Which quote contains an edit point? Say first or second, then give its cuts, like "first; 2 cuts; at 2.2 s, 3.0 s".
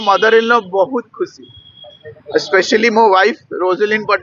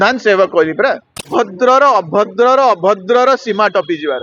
second; 1 cut; at 1.3 s